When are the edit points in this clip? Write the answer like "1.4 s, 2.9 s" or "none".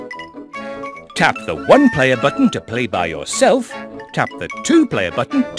1.1 s